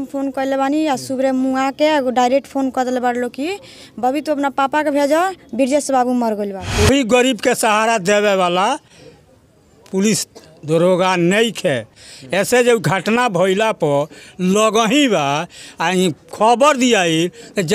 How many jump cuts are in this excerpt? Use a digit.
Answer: 1